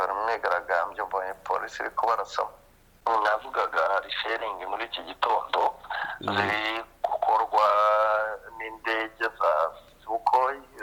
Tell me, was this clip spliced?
yes; 1 cut; at 2.9 s

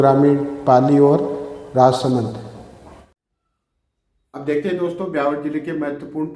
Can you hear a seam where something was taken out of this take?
yes; 1 cut; at 3.1 s

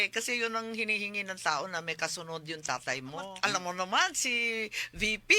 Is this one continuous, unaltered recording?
no; 1 cut; at 3.3 s

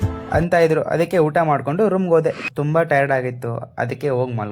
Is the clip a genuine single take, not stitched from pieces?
no; 1 cut; at 2.5 s

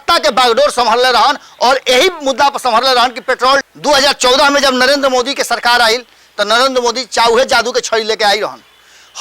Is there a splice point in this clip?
yes; 1 cut; at 3.7 s

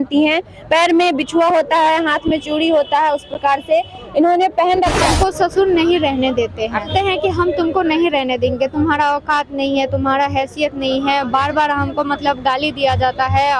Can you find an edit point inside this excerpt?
yes; 2 cuts; at 5.0 s, 6.9 s

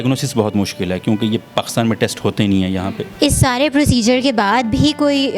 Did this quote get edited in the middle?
yes; 1 cut; at 3.0 s

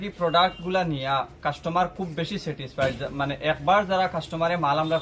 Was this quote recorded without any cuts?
yes; 0 cuts

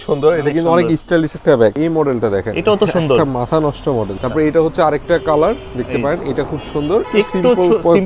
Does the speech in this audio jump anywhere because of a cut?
yes; 3 cuts; at 1.8 s, 4.2 s, 7.1 s

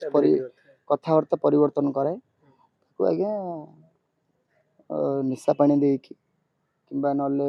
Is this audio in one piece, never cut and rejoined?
yes; 0 cuts

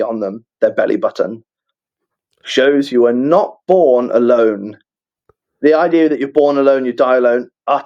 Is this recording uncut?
yes; 0 cuts

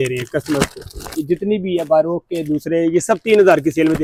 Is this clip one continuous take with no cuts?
yes; 0 cuts

